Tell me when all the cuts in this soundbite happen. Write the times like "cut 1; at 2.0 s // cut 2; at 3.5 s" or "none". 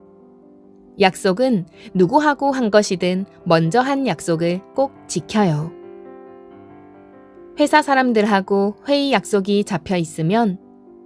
cut 1; at 0.9 s